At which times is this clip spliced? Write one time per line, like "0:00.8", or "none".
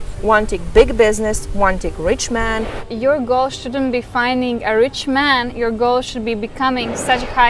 0:02.8